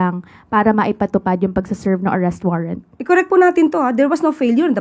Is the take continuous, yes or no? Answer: yes